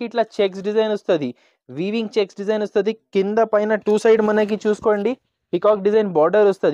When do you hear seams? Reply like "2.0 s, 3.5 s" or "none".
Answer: none